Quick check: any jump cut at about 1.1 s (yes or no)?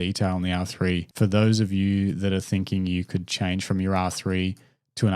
yes